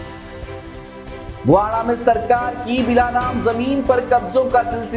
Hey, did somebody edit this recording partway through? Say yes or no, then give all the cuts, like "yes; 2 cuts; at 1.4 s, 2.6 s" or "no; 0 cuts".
yes; 1 cut; at 1.0 s